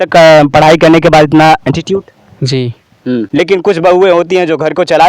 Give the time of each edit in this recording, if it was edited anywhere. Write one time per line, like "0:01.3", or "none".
0:03.3